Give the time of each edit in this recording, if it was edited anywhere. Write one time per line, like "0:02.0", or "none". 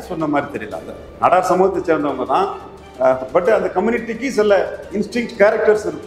none